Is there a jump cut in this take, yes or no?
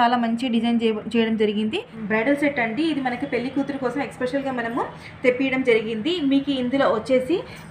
yes